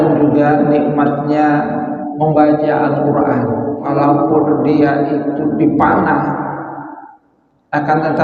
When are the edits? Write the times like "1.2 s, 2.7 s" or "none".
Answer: 3.9 s